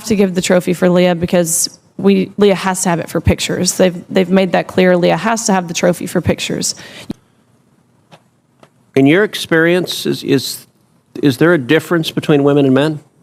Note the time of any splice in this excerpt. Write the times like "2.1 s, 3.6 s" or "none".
6.9 s